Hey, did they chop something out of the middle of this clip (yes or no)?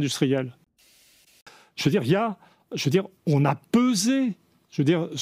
yes